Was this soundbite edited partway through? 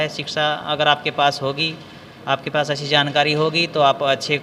no; 0 cuts

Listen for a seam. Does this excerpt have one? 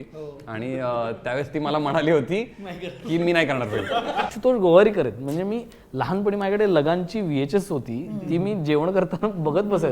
yes; 1 cut; at 4.3 s

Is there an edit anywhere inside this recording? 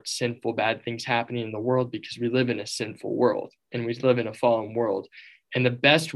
no; 0 cuts

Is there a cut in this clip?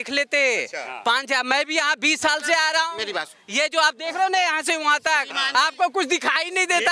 no; 0 cuts

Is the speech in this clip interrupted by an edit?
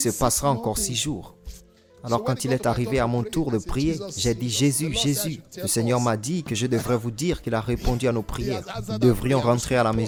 no; 0 cuts

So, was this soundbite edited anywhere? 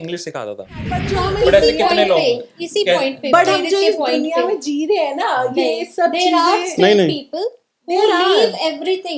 yes; 1 cut; at 1.2 s

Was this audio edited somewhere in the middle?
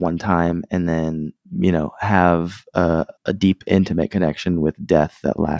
yes; 2 cuts; at 1.4 s, 3.2 s

